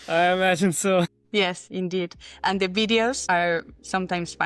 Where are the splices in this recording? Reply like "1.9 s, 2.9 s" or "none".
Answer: 1.3 s, 3.2 s